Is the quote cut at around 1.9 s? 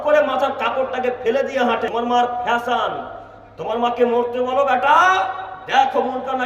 yes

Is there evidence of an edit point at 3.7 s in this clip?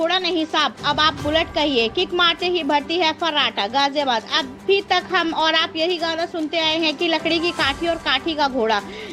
no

